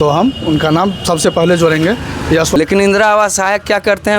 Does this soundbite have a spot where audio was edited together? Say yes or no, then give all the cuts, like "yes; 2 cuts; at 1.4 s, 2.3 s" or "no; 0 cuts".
yes; 1 cut; at 2.6 s